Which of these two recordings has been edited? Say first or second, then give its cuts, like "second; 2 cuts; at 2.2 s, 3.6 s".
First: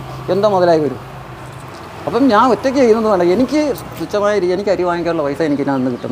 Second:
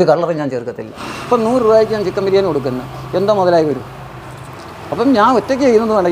second; 1 cut; at 1.0 s